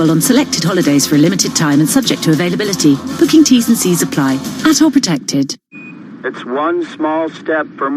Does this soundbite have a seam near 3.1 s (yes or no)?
no